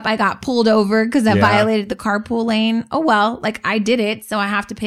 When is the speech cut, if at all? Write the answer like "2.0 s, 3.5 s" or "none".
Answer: none